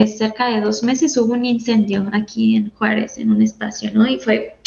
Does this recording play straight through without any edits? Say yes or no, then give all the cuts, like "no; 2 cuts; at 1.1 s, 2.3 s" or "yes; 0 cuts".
yes; 0 cuts